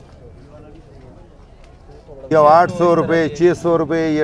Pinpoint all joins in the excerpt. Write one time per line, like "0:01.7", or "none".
0:02.3